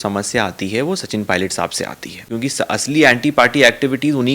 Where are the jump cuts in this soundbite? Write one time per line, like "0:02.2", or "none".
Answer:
0:02.2